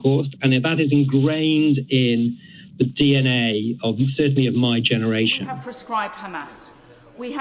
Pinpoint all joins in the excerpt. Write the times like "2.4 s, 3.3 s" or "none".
5.4 s